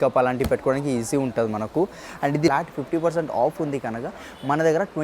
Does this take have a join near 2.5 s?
yes; 1 cut; at 2.5 s

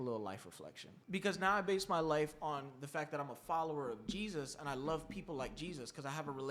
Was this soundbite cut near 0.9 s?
yes; 1 cut; at 0.9 s

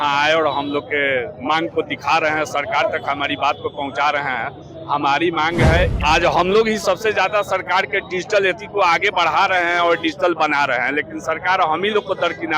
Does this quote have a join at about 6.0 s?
yes; 1 cut; at 6.0 s

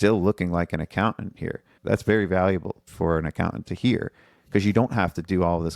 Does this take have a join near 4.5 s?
no; 2 cuts; at 1.7 s, 2.9 s

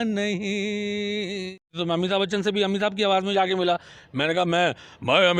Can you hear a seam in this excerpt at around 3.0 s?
no; 1 cut; at 1.8 s

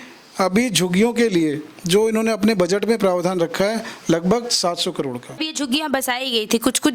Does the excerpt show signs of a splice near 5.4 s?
yes; 1 cut; at 5.4 s

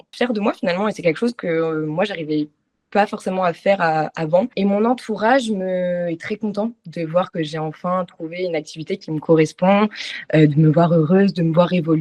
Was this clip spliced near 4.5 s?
yes; 1 cut; at 4.5 s

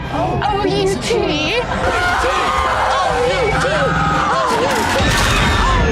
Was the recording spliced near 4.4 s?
no; 1 cut; at 1.8 s

